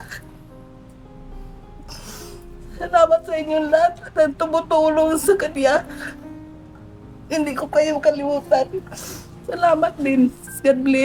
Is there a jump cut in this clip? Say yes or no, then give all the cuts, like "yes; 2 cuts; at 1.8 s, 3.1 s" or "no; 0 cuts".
no; 0 cuts